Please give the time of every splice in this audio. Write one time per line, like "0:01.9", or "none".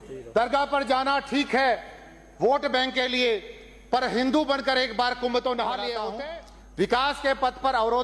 0:06.2